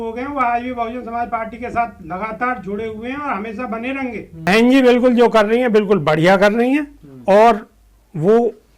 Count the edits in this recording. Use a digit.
1